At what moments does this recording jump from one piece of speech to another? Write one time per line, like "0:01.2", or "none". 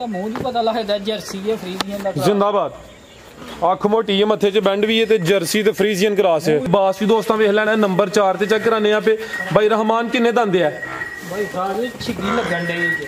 0:06.7